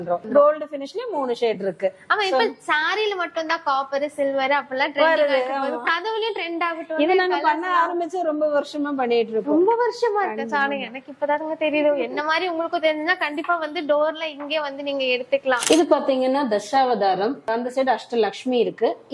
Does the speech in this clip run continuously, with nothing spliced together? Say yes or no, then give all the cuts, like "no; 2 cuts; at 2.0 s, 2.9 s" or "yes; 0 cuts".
yes; 0 cuts